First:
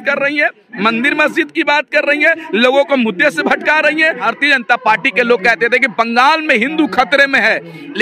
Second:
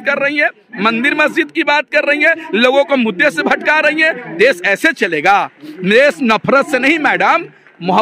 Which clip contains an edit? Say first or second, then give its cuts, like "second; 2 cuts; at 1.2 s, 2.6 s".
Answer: first; 1 cut; at 4.3 s